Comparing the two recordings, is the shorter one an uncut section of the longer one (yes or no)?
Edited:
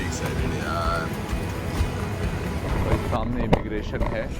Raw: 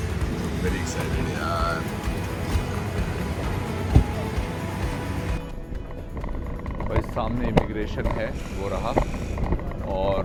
no